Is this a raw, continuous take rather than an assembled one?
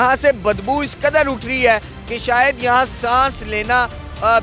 yes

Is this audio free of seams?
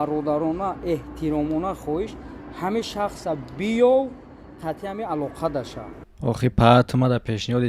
no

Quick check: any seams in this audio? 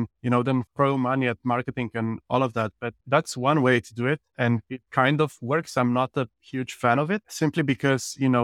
yes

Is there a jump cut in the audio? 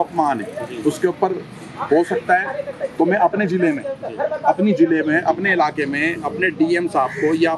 no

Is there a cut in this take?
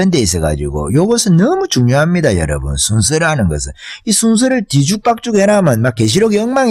no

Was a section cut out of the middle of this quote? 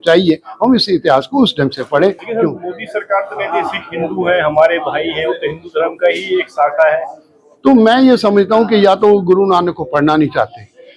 no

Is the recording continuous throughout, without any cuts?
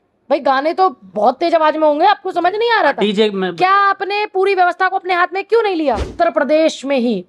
no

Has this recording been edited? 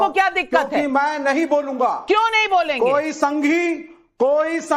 no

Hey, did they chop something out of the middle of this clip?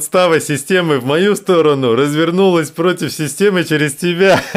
no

